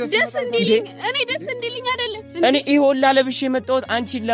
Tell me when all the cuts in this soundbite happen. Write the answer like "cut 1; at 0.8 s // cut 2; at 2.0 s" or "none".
none